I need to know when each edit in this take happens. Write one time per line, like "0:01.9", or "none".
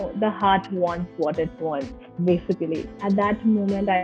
0:02.9